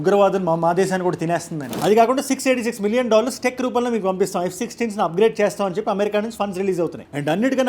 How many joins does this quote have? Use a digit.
1